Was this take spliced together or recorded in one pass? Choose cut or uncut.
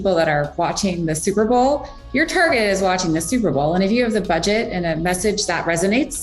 uncut